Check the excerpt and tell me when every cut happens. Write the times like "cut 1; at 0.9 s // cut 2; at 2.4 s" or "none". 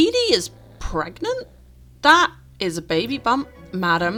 none